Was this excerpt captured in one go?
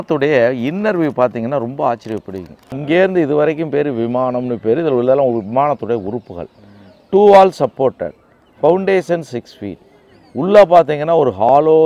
no; 1 cut; at 2.7 s

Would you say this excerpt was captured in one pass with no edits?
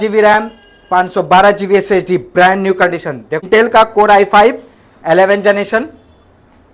no; 1 cut; at 3.4 s

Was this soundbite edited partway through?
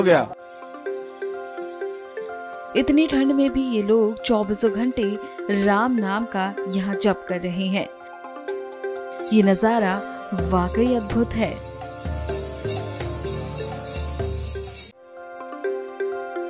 yes; 1 cut; at 15.1 s

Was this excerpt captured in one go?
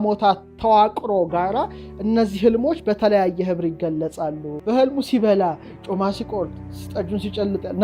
no; 1 cut; at 4.5 s

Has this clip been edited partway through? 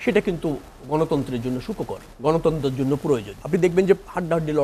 yes; 2 cuts; at 2.0 s, 3.3 s

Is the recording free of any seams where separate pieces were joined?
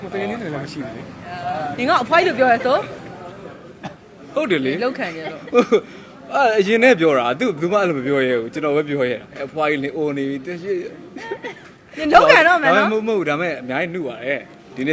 no; 1 cut; at 1.5 s

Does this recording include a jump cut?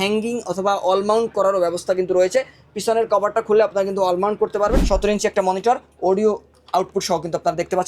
yes; 1 cut; at 4.8 s

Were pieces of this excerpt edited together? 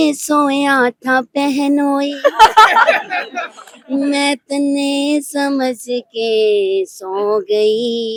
no; 0 cuts

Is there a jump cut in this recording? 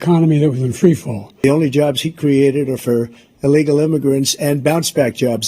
yes; 1 cut; at 1.4 s

